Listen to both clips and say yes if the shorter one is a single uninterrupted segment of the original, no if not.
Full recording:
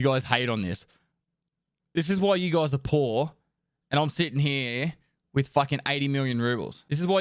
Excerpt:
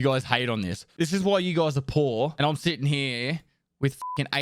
no